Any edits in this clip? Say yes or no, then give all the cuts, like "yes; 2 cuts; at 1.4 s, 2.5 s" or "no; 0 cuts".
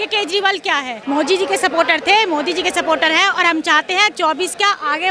yes; 1 cut; at 0.9 s